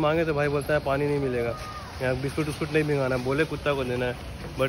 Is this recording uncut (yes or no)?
yes